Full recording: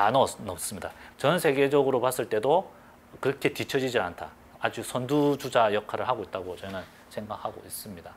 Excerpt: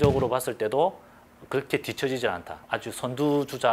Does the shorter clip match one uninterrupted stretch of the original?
no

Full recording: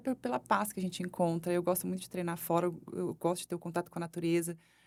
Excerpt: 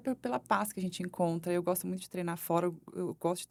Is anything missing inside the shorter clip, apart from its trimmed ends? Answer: no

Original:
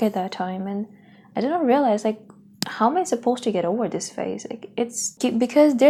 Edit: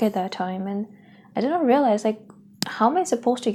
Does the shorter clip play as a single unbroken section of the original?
yes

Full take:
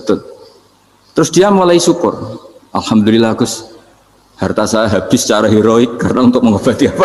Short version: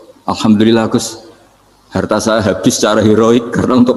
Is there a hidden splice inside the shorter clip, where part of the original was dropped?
no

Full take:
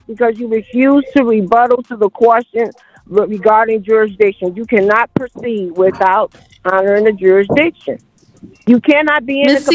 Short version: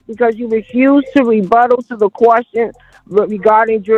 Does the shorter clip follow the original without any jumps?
yes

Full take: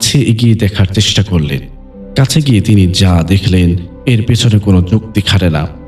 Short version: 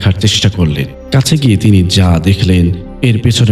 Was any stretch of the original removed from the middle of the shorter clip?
yes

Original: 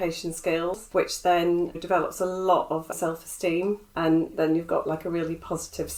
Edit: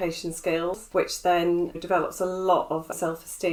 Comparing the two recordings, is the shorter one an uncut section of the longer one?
yes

